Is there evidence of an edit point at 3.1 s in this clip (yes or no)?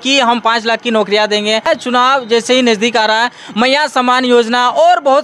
no